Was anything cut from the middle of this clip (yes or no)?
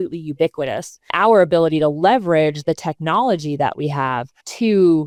no